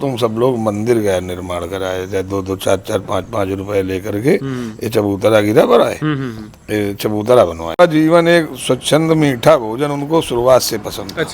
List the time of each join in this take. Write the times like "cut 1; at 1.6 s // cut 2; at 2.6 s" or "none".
cut 1; at 7.8 s